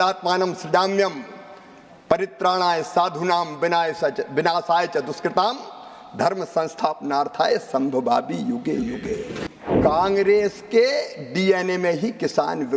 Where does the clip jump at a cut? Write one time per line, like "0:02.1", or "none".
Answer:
0:09.5